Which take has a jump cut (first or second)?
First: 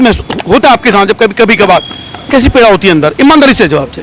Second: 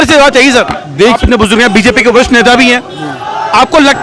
second